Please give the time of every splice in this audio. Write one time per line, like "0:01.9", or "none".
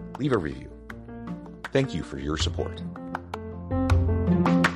none